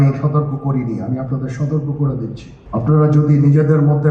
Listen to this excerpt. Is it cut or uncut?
cut